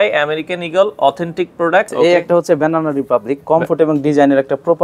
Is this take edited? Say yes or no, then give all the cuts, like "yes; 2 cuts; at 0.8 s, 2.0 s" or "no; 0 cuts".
yes; 1 cut; at 1.9 s